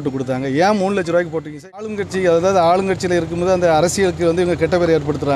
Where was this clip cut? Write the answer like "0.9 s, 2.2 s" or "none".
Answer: 1.8 s